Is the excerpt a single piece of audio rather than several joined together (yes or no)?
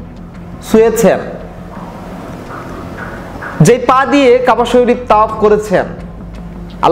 yes